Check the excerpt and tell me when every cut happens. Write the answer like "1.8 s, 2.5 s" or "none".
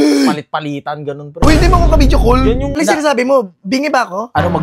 2.7 s